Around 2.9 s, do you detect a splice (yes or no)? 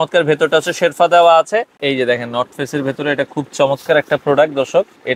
no